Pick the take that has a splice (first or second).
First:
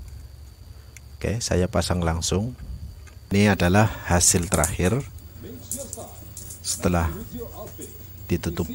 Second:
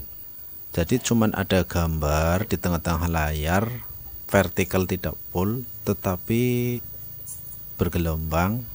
first